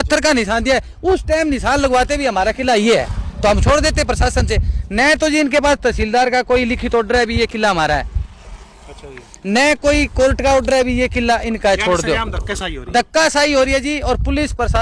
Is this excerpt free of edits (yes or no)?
yes